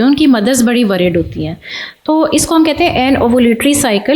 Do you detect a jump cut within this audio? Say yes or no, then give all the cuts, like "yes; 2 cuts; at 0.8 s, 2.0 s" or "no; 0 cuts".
no; 0 cuts